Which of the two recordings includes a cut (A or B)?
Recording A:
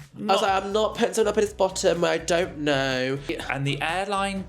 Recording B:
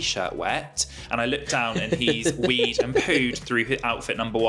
A